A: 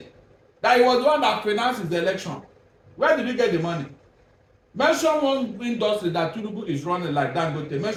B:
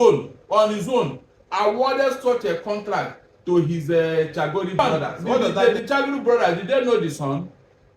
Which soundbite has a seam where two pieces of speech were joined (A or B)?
B